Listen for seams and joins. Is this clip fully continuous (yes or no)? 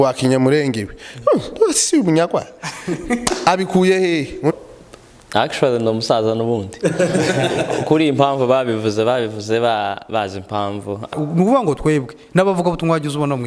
no